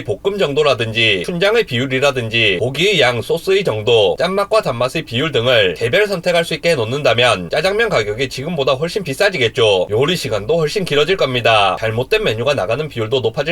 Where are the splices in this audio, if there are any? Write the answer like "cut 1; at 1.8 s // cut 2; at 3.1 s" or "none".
cut 1; at 7.5 s // cut 2; at 11.8 s